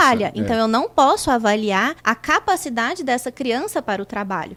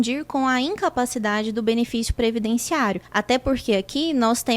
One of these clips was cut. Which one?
second; 1 cut; at 3.1 s

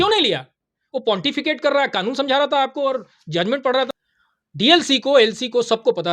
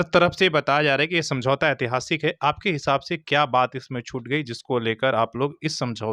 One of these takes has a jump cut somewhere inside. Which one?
first; 1 cut; at 3.9 s

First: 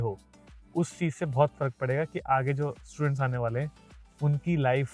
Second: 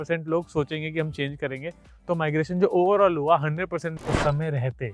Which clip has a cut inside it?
second; 1 cut; at 4.0 s

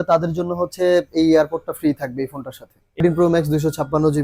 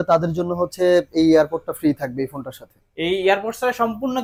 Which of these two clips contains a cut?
first; 1 cut; at 3.0 s

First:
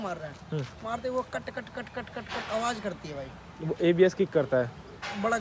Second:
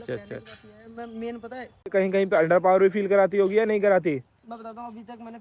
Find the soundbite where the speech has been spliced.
second; 1 cut; at 1.9 s

